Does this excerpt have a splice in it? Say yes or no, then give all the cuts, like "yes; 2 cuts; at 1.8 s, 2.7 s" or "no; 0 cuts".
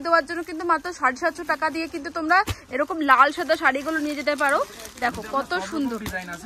no; 0 cuts